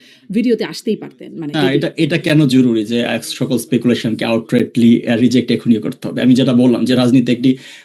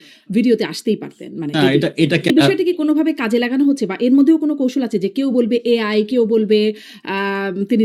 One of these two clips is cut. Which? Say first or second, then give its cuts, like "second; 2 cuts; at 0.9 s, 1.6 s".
second; 1 cut; at 2.3 s